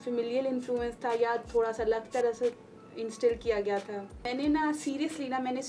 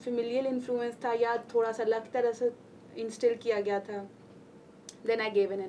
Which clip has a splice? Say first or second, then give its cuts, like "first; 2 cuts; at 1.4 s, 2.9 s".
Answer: first; 1 cut; at 4.3 s